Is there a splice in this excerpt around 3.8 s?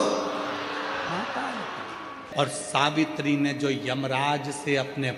no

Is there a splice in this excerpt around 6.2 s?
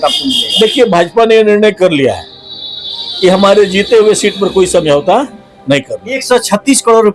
yes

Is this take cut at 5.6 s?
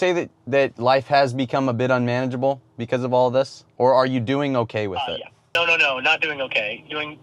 yes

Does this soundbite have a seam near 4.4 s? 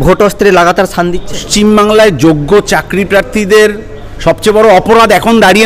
no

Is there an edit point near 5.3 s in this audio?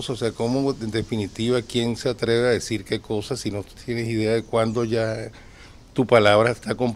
no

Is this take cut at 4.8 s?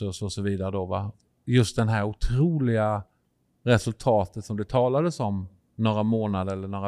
no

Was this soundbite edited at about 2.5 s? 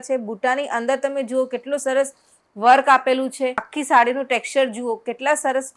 no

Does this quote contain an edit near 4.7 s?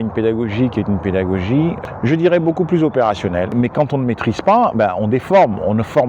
no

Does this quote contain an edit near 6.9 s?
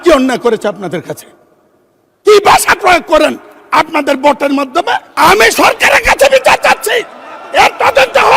no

